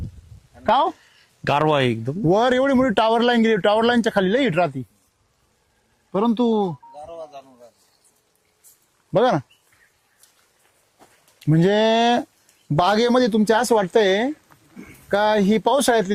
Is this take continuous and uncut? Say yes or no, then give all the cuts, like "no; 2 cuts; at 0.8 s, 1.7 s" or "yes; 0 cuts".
yes; 0 cuts